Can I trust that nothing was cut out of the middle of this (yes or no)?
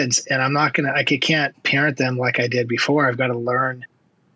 yes